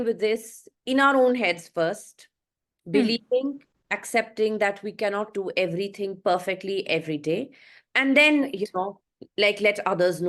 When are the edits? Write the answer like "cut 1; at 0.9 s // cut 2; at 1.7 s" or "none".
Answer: none